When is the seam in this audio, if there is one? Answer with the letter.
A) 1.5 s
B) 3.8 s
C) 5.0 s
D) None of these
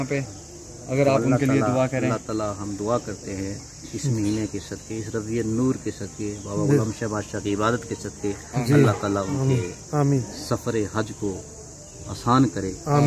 D